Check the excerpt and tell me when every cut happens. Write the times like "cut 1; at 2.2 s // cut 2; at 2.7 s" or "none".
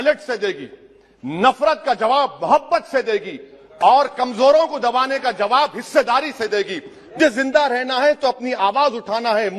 cut 1; at 7.2 s